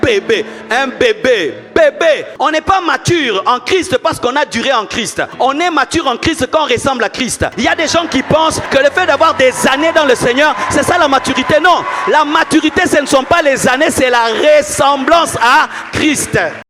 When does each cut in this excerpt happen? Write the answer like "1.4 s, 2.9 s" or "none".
2.3 s, 5.3 s, 7.5 s, 8.6 s